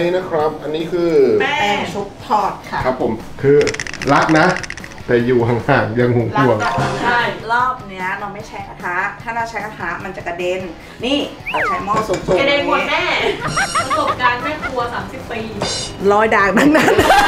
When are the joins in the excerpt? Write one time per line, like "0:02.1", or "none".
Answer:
0:03.2
0:13.5